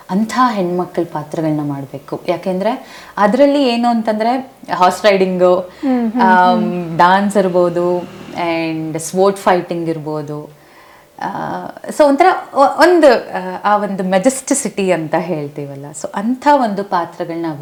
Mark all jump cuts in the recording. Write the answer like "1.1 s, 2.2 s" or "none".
none